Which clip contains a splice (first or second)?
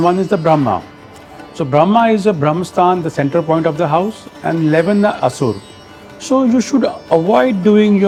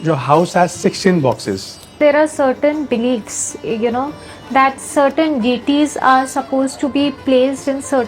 second